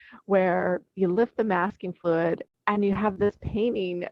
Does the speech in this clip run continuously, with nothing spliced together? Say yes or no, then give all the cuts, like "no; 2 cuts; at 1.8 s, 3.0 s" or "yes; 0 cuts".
no; 1 cut; at 2.5 s